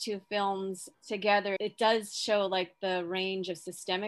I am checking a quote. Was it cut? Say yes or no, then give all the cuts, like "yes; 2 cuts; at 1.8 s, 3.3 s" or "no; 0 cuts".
yes; 1 cut; at 1.6 s